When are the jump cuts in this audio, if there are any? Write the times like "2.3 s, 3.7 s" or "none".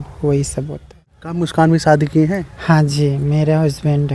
1.2 s